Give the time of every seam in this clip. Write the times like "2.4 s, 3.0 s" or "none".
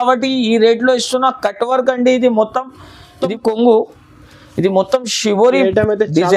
3.2 s